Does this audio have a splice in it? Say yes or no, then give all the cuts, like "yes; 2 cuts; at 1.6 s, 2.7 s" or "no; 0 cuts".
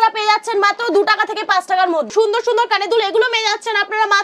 yes; 1 cut; at 2.1 s